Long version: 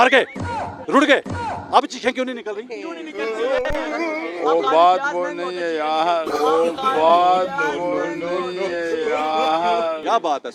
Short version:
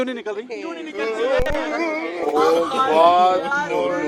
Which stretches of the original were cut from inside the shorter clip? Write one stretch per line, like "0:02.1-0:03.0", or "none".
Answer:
0:04.4-0:06.3